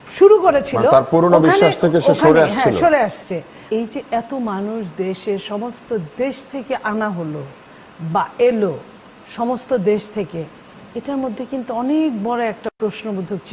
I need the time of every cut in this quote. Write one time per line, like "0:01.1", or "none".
0:03.6